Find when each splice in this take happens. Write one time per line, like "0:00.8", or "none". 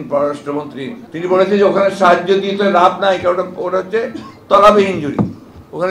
0:01.0